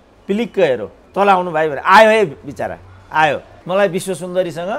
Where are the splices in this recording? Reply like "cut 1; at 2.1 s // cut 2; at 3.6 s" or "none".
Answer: cut 1; at 1.0 s // cut 2; at 3.5 s